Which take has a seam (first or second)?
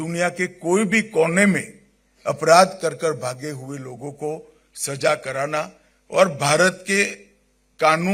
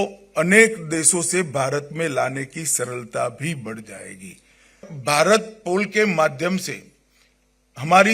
second